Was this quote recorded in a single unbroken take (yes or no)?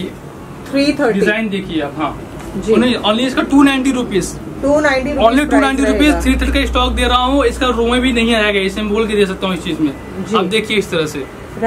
yes